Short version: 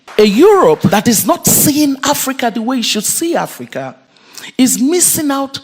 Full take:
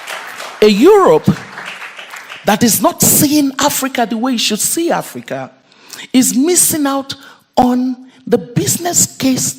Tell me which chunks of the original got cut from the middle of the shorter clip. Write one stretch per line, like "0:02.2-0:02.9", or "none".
0:01.3-0:02.5